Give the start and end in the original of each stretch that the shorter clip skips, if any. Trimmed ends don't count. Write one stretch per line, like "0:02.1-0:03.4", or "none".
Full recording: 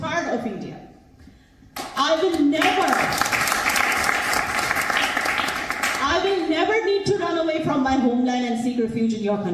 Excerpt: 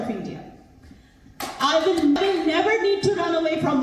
0:02.5-0:06.2